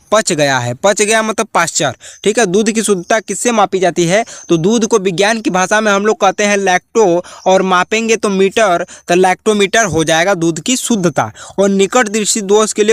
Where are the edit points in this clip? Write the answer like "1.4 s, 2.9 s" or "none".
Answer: none